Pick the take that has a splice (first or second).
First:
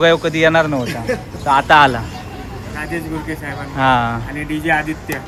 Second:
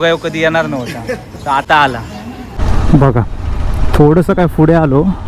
second